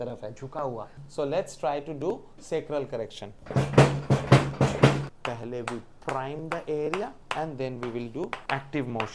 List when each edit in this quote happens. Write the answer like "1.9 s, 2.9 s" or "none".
1.0 s, 5.0 s